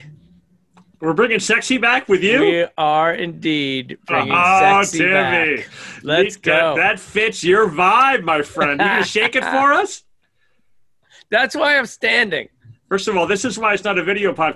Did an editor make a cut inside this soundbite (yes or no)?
no